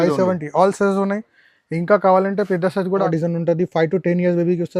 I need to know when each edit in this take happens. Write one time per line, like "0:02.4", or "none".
0:03.1